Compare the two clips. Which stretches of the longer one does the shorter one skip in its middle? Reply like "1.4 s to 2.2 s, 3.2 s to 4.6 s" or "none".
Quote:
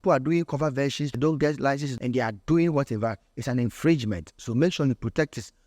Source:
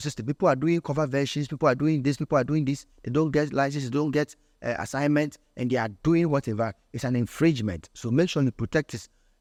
1.4 s to 3.0 s, 3.8 s to 5.5 s